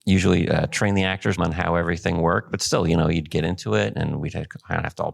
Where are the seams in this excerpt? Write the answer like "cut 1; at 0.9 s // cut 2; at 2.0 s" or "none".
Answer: cut 1; at 1.4 s